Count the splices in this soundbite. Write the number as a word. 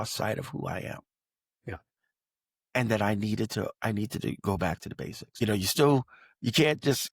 one